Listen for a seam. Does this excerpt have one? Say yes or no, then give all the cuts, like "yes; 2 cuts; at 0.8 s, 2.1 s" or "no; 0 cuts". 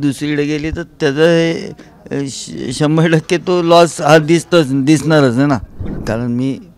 yes; 1 cut; at 5.9 s